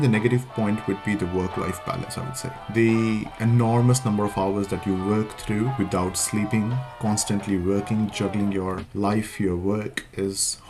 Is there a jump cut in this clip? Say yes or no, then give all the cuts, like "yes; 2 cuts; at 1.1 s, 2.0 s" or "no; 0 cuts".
no; 0 cuts